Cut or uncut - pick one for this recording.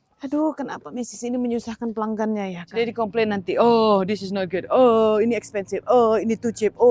cut